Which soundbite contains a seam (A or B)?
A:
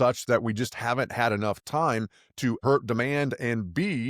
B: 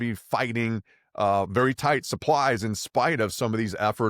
A